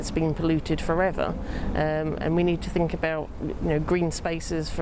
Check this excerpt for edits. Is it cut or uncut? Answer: uncut